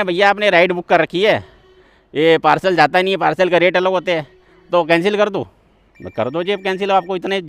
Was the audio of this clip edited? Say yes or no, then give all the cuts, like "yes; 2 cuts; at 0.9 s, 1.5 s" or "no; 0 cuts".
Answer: no; 0 cuts